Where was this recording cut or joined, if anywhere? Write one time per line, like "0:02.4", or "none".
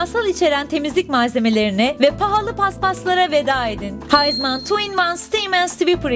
0:01.9
0:04.0

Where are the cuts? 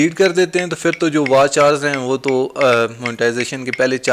none

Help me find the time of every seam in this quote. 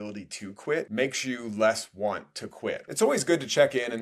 0:00.9
0:02.8

